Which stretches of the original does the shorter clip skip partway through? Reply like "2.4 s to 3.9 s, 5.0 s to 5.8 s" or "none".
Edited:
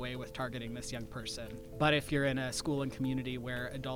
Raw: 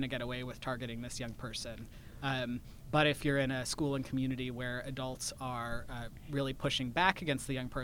1.9 s to 2.8 s